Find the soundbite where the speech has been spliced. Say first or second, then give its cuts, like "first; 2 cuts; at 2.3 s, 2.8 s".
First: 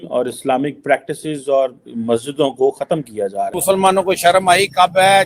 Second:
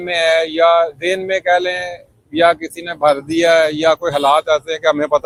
first; 1 cut; at 3.6 s